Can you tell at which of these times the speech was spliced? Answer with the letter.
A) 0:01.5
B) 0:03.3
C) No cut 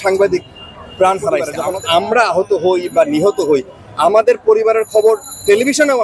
A